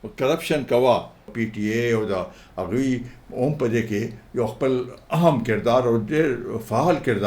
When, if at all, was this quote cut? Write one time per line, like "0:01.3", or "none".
0:01.3